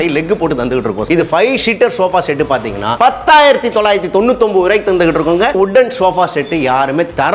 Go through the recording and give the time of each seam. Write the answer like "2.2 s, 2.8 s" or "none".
1.1 s, 5.5 s